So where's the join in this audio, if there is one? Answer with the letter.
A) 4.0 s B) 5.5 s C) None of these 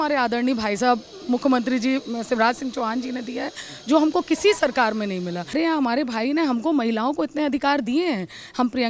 B